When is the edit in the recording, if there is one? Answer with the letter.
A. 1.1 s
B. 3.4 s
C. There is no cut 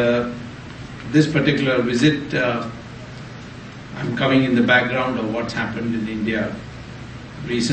C